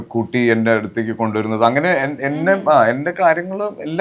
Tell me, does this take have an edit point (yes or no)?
no